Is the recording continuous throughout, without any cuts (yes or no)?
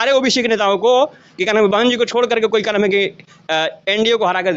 yes